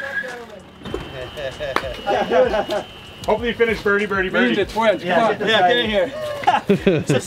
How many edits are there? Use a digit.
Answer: 0